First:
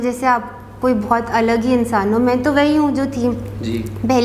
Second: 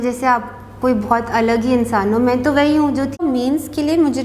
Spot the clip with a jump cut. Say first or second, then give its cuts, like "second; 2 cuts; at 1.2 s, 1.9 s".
second; 1 cut; at 3.2 s